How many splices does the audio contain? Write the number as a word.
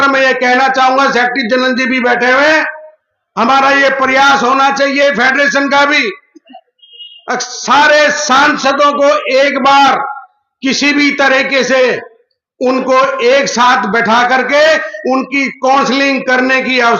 zero